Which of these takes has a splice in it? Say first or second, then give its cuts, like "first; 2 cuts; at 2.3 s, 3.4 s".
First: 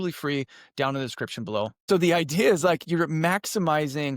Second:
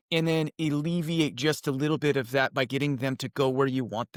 first; 1 cut; at 1.8 s